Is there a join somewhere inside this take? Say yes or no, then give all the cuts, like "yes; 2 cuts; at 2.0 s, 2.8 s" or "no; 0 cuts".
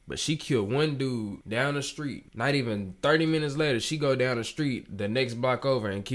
no; 0 cuts